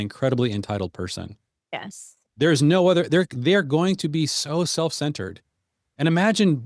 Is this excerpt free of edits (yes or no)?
yes